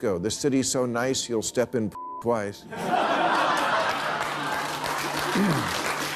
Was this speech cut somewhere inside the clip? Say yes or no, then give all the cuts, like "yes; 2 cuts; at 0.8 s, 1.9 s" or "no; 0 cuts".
no; 0 cuts